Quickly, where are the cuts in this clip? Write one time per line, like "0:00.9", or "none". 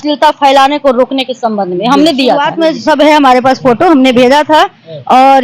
0:02.5